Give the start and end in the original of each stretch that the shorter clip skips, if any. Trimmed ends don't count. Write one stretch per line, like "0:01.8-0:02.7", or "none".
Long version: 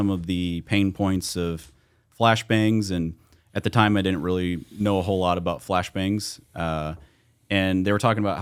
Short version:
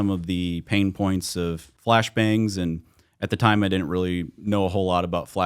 0:01.7-0:02.0